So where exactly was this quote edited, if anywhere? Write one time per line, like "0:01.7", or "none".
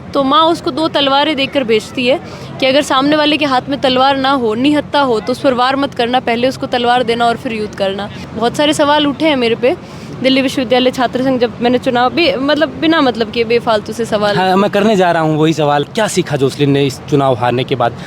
0:08.2
0:15.9